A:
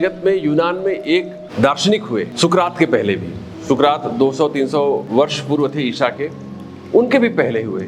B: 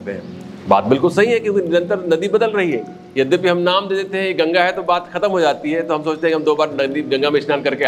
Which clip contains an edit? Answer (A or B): A